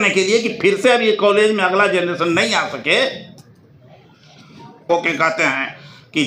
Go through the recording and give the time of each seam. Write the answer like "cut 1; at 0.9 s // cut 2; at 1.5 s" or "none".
cut 1; at 4.9 s